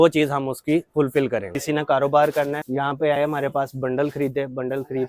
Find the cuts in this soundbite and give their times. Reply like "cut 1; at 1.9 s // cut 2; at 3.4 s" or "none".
cut 1; at 1.5 s // cut 2; at 2.6 s